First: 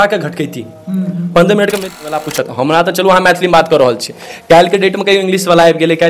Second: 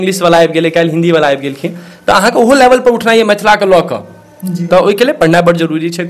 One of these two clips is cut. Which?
first; 1 cut; at 2.1 s

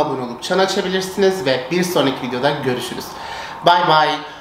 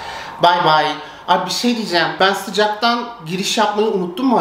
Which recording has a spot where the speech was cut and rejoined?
second; 1 cut; at 2.1 s

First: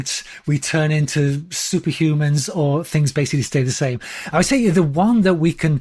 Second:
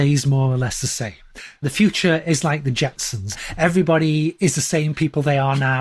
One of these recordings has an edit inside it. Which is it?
second; 2 cuts; at 1.6 s, 3.4 s

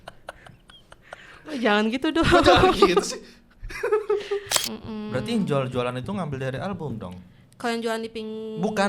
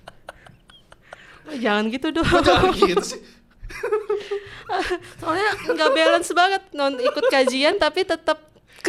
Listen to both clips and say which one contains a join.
first; 1 cut; at 4.5 s

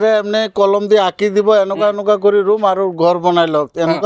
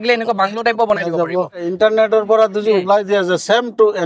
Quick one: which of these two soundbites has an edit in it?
second; 1 cut; at 1.6 s

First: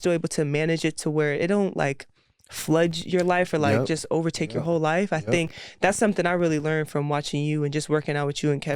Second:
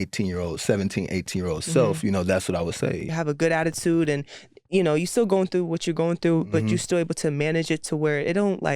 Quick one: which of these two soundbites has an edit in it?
second; 1 cut; at 3.1 s

